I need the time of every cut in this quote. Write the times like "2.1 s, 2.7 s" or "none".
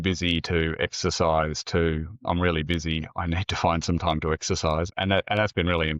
4.9 s